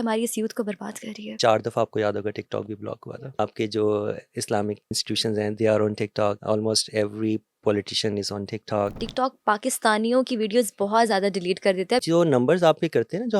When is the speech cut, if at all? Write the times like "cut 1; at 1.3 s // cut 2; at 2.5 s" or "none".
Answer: cut 1; at 1.4 s // cut 2; at 3.0 s // cut 3; at 4.9 s // cut 4; at 6.4 s // cut 5; at 9.0 s // cut 6; at 12.0 s